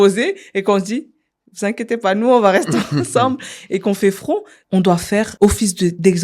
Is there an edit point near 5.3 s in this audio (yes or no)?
yes